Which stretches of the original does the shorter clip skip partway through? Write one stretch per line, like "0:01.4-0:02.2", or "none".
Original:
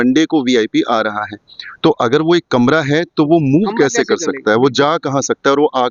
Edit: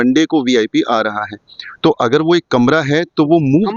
none